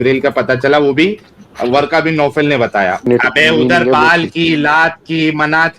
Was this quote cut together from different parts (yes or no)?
yes